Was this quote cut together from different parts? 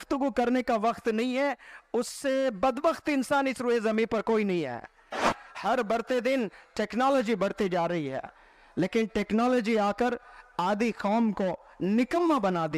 yes; 1 cut; at 5.4 s

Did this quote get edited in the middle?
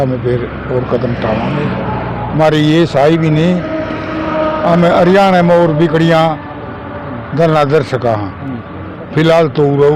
no; 0 cuts

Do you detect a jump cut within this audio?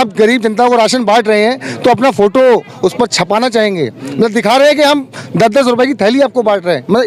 no; 0 cuts

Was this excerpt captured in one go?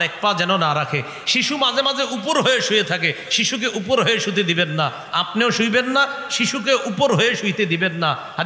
yes; 0 cuts

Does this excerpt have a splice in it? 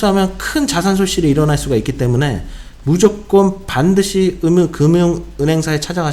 no; 0 cuts

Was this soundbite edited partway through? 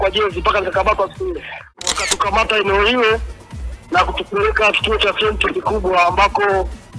yes; 1 cut; at 2.0 s

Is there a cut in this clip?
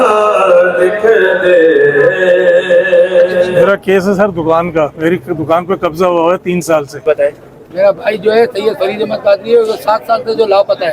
yes; 2 cuts; at 3.7 s, 7.4 s

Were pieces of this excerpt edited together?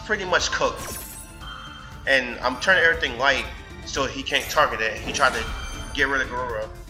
no; 0 cuts

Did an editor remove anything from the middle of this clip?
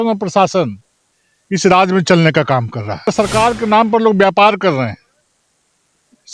yes; 1 cut; at 3.1 s

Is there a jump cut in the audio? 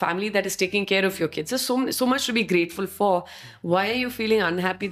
no; 0 cuts

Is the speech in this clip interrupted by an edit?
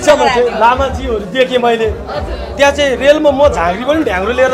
no; 0 cuts

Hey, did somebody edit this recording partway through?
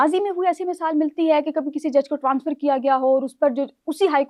no; 0 cuts

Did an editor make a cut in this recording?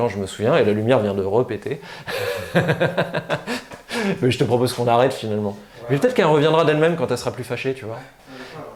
no; 0 cuts

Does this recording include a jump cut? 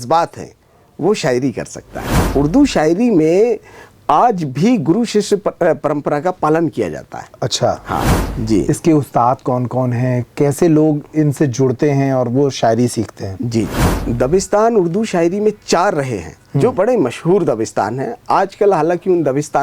yes; 3 cuts; at 2.3 s, 8.2 s, 14.0 s

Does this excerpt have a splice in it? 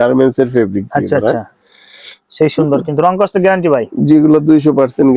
no; 0 cuts

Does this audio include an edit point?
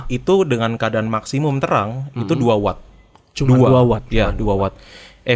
no; 0 cuts

